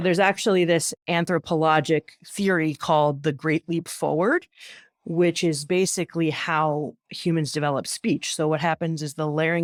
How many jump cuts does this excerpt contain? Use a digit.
0